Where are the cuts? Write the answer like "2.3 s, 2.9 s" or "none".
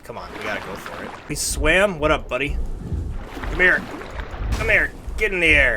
1.3 s

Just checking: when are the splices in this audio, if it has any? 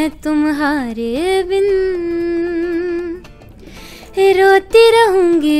none

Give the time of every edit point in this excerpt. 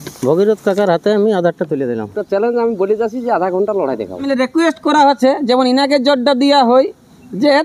2.2 s, 4.2 s

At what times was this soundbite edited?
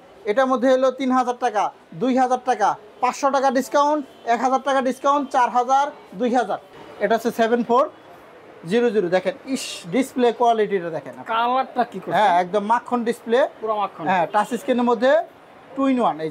6.8 s

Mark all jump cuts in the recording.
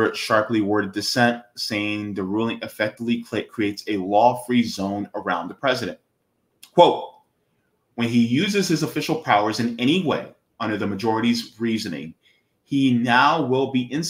none

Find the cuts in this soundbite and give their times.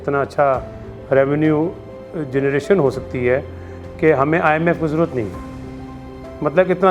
none

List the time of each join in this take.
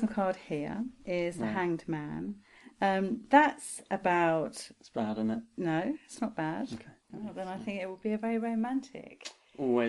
7.1 s

